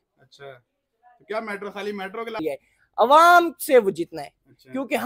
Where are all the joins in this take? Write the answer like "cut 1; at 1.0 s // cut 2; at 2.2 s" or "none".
cut 1; at 2.4 s